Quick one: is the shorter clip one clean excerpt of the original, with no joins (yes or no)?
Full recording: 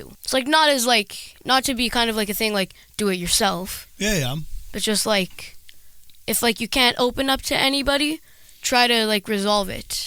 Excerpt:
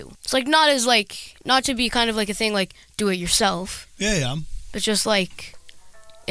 yes